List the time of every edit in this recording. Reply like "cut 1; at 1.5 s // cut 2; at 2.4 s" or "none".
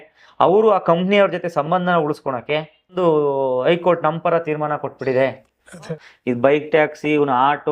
cut 1; at 2.9 s // cut 2; at 5.9 s

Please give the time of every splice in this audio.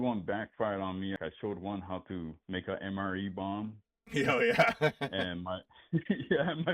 cut 1; at 1.2 s

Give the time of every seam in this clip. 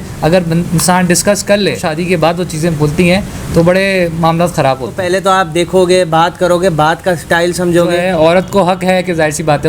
cut 1; at 1.9 s // cut 2; at 5.0 s // cut 3; at 8.0 s

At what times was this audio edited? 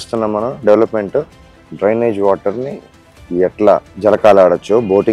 cut 1; at 3.9 s

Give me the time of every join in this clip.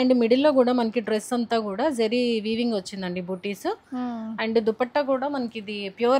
none

